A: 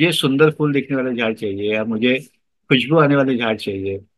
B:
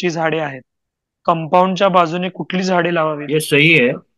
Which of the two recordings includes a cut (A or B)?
B